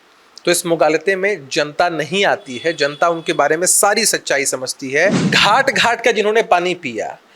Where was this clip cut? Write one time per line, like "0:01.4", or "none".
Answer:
0:05.2